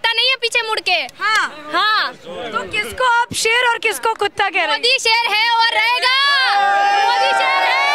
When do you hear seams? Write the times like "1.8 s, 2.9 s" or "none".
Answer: none